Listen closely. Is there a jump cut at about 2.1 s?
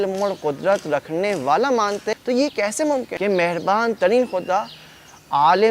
yes; 2 cuts; at 2.1 s, 3.1 s

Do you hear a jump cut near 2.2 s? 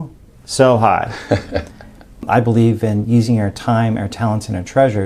yes; 1 cut; at 2.2 s

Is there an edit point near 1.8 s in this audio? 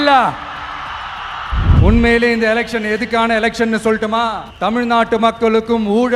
yes; 2 cuts; at 1.8 s, 4.5 s

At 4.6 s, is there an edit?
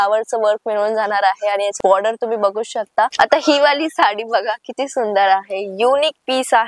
no; 1 cut; at 3.1 s

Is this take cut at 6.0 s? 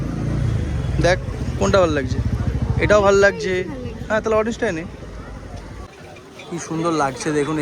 yes; 1 cut; at 6.0 s

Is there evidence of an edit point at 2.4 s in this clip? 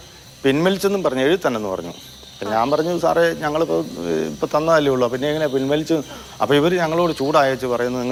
no; 0 cuts

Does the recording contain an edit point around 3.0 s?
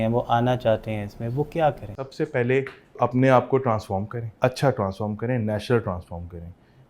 yes; 3 cuts; at 2.0 s, 3.0 s, 4.2 s

